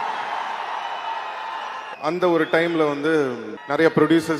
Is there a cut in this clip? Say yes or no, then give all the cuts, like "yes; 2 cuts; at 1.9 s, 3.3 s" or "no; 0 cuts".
yes; 2 cuts; at 1.9 s, 3.5 s